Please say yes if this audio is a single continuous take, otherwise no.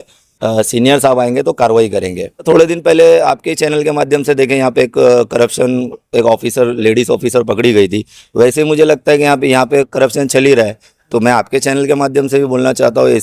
no